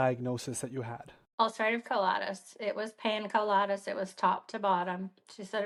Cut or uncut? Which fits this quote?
uncut